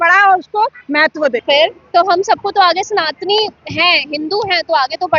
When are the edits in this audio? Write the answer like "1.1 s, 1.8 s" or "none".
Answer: 1.4 s